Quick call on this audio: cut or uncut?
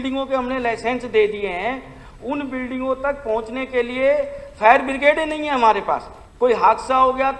uncut